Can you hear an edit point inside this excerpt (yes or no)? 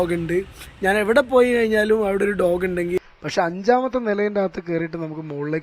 yes